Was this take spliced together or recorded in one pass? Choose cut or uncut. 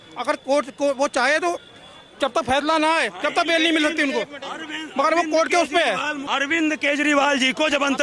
cut